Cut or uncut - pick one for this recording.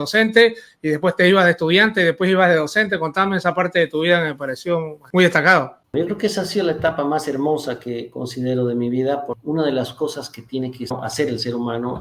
cut